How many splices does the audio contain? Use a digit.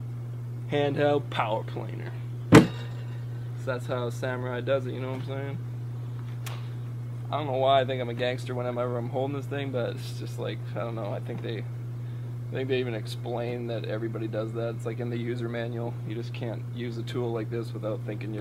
1